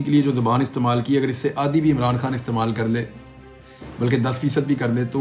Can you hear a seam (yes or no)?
no